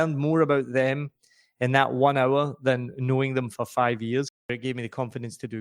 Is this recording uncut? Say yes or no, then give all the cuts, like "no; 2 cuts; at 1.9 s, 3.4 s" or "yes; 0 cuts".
no; 1 cut; at 4.5 s